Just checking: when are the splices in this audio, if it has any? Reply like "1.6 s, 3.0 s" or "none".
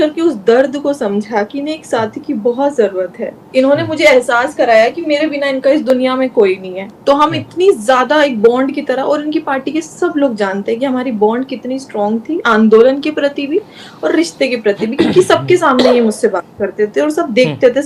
none